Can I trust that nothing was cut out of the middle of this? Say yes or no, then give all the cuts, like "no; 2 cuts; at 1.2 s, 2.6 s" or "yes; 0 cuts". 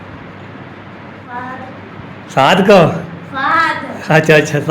no; 1 cut; at 1.2 s